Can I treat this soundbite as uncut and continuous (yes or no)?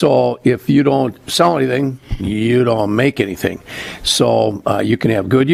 yes